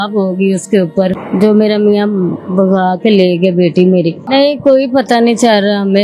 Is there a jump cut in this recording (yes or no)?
yes